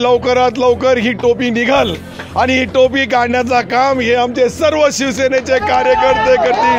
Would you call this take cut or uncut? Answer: uncut